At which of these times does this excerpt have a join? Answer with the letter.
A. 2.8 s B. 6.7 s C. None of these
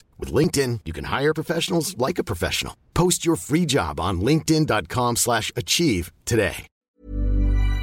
B